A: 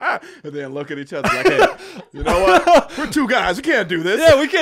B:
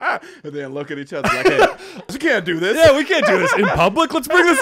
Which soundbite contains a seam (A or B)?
B